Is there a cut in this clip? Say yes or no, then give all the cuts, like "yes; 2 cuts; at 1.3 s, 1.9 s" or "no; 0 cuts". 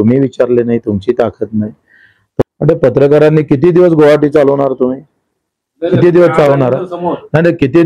yes; 1 cut; at 2.4 s